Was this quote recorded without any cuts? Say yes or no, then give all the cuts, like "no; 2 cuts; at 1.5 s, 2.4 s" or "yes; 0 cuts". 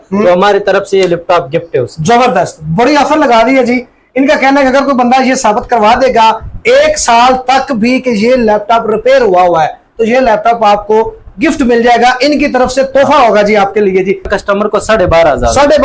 no; 1 cut; at 14.3 s